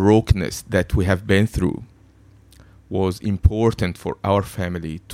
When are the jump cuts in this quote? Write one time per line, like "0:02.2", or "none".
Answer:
none